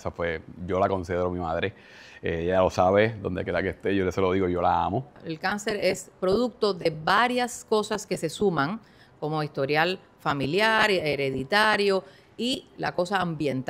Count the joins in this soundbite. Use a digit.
1